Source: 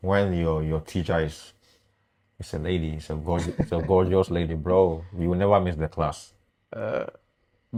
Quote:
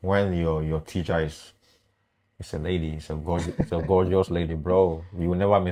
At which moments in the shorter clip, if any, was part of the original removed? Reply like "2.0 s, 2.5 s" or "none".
none